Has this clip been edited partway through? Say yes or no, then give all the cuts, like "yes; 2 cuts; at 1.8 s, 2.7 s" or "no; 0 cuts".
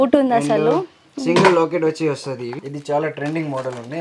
yes; 1 cut; at 2.6 s